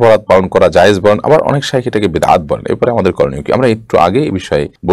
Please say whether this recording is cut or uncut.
uncut